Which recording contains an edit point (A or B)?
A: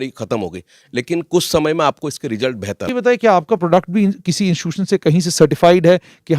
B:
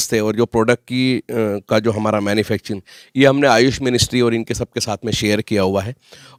A